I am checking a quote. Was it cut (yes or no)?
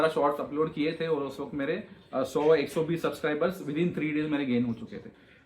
no